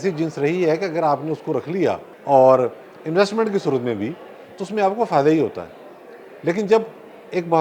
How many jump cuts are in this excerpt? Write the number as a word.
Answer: one